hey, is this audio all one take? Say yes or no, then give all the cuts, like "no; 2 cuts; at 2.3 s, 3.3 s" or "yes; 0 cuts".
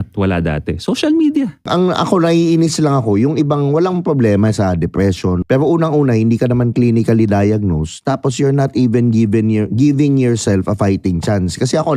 no; 2 cuts; at 1.7 s, 5.4 s